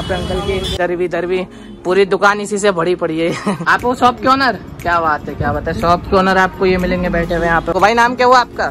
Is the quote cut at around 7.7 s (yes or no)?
yes